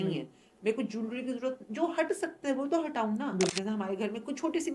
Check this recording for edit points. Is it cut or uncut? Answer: cut